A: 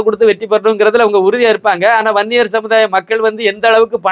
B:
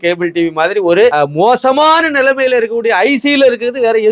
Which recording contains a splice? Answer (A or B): B